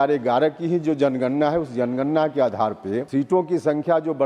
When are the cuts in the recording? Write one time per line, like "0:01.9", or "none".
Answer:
0:03.0